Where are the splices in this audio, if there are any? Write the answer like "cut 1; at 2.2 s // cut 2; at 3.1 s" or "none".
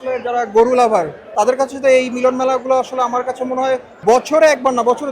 cut 1; at 1.2 s // cut 2; at 3.9 s

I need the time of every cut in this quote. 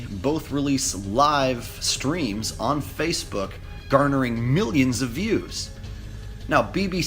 cut 1; at 2.3 s

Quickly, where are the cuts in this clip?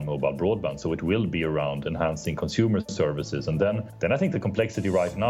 cut 1; at 3.9 s

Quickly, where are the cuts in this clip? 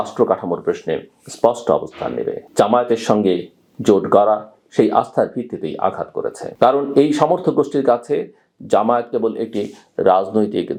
none

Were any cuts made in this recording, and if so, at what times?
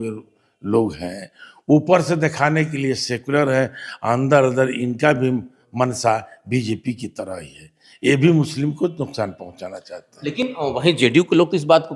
none

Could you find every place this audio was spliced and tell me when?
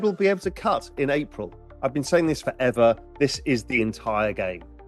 cut 1; at 1.6 s

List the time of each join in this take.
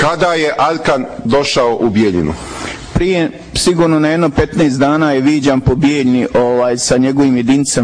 none

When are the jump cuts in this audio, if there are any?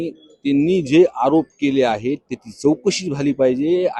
none

